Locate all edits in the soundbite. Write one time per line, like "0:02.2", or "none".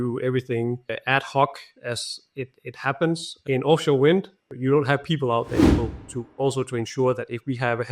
0:05.8